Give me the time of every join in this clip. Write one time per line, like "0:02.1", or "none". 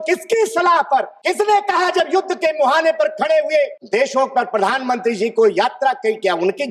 0:01.1
0:03.8